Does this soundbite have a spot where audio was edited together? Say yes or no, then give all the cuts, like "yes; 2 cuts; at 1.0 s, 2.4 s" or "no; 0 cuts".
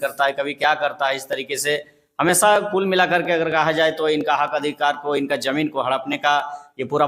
no; 0 cuts